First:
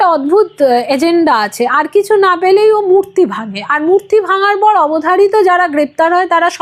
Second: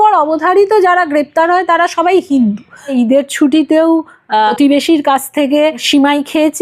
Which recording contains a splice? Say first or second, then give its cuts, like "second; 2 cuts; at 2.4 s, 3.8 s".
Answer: second; 3 cuts; at 2.9 s, 4.5 s, 5.8 s